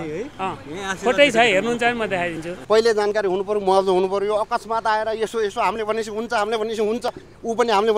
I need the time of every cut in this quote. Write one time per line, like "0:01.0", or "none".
0:02.5